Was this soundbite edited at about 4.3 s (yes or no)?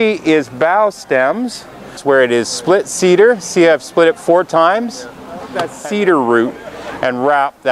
no